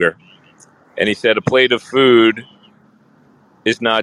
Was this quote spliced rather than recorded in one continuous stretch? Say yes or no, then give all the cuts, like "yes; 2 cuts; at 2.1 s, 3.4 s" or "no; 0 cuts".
no; 0 cuts